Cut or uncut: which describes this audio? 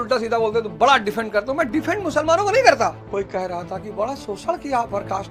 cut